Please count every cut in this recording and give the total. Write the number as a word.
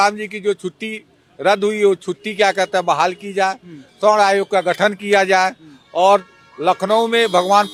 zero